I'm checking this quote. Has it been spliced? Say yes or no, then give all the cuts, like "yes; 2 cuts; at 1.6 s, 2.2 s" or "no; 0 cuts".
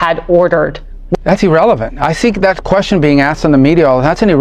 yes; 1 cut; at 1.2 s